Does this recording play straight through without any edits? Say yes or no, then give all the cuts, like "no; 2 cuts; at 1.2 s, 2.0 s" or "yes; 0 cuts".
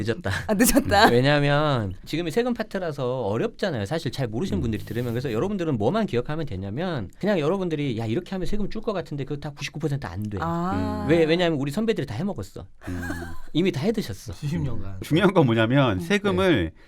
no; 3 cuts; at 2.1 s, 7.1 s, 15.0 s